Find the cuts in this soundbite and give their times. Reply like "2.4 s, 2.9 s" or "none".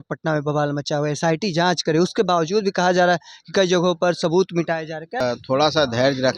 5.2 s